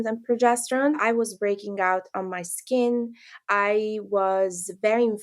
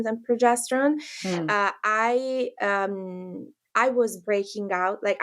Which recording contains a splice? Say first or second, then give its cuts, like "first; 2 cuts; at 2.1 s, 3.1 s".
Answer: first; 1 cut; at 1.0 s